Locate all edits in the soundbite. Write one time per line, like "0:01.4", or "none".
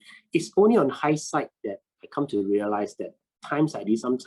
none